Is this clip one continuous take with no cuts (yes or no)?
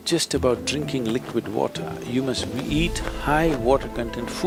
yes